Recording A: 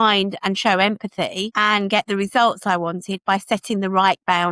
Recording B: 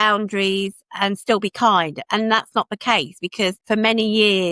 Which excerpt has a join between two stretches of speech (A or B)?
B